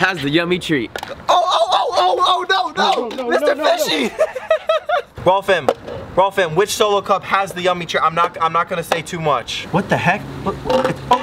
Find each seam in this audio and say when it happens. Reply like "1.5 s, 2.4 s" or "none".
none